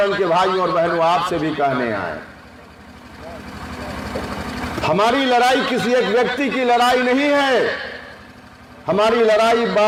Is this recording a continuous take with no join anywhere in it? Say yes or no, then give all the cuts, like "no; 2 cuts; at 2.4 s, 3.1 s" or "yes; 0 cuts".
yes; 0 cuts